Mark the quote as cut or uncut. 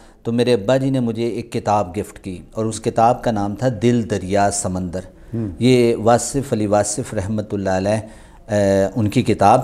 uncut